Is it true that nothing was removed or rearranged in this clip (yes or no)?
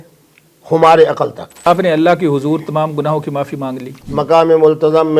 no